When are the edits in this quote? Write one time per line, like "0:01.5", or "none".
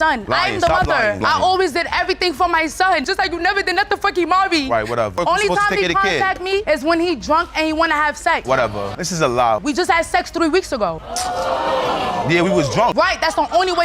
none

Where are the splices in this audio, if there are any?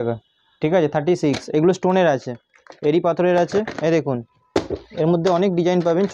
none

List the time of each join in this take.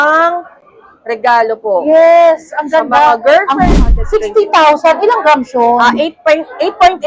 0:03.7

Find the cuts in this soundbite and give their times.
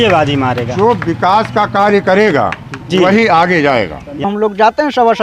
0:04.2

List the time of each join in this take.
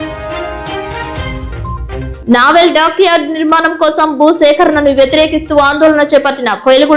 none

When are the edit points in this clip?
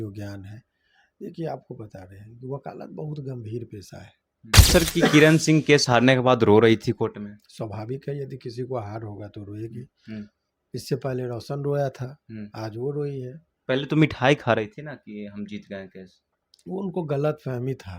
0:04.7

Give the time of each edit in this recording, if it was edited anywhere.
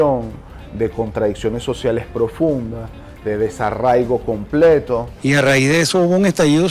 0:05.1

